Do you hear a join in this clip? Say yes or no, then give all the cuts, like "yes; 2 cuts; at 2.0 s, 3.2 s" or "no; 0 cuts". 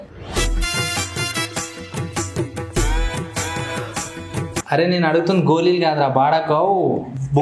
yes; 1 cut; at 4.6 s